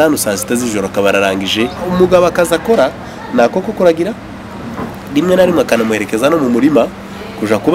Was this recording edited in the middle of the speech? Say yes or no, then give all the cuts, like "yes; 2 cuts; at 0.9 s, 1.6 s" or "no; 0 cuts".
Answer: yes; 1 cut; at 1.8 s